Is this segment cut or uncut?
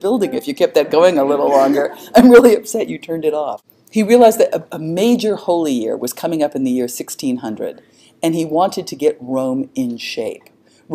uncut